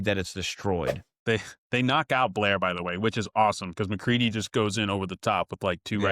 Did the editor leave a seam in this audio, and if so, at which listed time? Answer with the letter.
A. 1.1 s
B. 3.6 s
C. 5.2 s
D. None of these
A